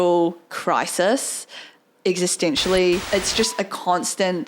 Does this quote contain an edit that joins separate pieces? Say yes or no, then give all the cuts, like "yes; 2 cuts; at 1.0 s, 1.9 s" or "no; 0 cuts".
yes; 1 cut; at 3.0 s